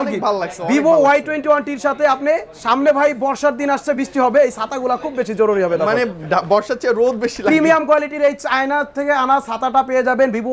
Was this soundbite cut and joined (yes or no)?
no